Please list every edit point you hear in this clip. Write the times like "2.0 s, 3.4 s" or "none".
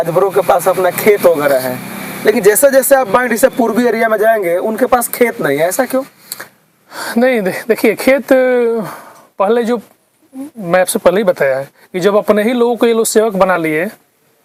none